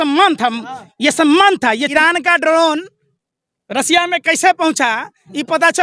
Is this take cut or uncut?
cut